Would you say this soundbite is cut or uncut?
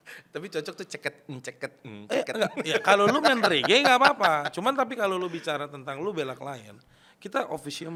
uncut